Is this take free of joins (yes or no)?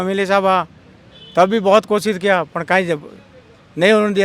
yes